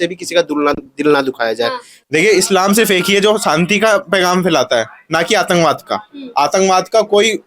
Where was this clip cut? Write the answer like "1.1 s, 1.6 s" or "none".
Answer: 1.9 s